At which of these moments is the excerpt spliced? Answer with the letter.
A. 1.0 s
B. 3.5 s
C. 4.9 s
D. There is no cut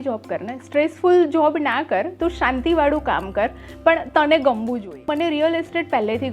C